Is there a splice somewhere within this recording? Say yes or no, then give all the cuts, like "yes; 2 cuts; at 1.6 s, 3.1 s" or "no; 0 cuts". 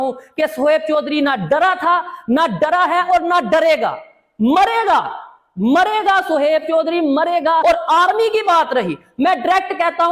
yes; 1 cut; at 7.6 s